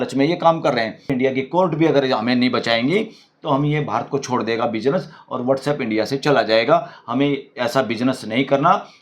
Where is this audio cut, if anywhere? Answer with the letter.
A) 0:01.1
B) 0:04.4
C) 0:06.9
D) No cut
A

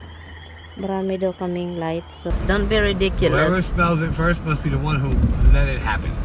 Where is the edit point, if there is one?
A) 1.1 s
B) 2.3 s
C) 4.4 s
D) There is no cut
B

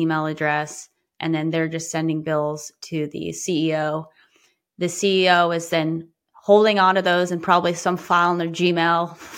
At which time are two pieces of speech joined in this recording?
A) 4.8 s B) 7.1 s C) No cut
C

